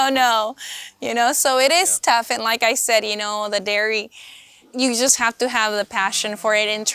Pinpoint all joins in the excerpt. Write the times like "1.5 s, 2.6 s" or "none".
4.7 s